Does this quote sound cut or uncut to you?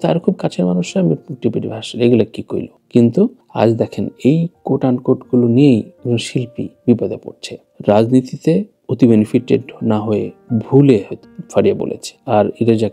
cut